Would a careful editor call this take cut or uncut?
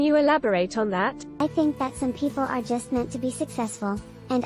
cut